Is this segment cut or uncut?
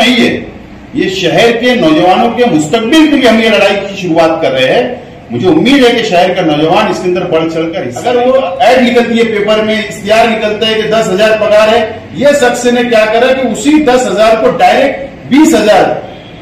cut